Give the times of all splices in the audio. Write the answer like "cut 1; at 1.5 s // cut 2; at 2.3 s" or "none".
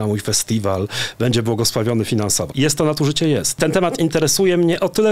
cut 1; at 2.5 s // cut 2; at 3.6 s